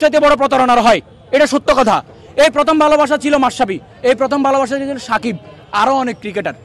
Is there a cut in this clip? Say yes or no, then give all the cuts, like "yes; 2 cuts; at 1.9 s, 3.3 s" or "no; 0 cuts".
no; 0 cuts